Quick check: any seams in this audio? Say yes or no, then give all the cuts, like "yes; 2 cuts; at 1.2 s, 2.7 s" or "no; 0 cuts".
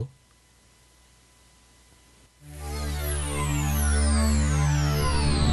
no; 0 cuts